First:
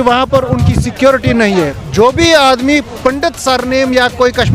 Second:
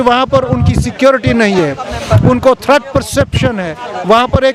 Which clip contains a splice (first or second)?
first